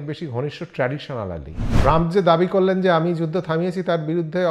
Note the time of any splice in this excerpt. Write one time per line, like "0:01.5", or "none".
0:01.6